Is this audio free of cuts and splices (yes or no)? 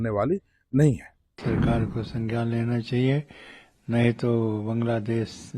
no